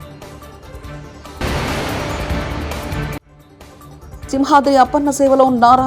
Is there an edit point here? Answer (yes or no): yes